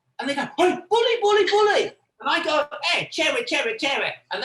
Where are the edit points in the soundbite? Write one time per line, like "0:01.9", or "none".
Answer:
none